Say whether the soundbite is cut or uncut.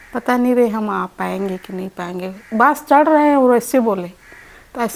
uncut